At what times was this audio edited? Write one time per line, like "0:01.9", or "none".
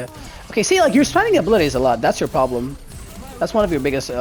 none